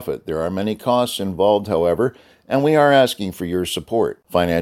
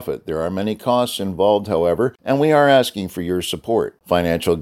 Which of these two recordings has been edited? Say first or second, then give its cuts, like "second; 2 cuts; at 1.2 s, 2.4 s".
second; 1 cut; at 2.2 s